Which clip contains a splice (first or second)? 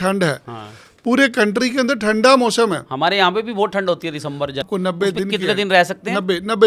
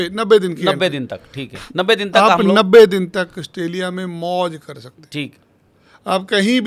first